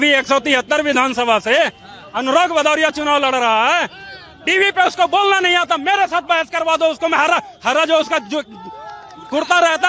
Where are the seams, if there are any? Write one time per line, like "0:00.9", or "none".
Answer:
none